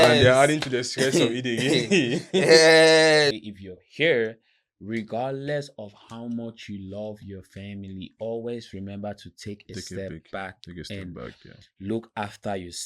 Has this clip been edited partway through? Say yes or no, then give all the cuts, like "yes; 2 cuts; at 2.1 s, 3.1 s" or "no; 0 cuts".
yes; 1 cut; at 3.4 s